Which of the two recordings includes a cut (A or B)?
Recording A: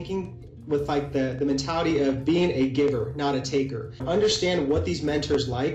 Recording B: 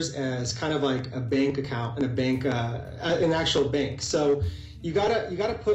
A